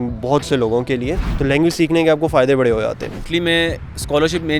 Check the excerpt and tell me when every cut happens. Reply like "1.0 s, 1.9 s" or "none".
1.3 s, 3.1 s